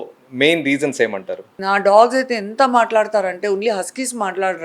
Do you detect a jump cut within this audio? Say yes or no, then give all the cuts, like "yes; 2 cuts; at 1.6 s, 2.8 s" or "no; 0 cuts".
yes; 1 cut; at 1.5 s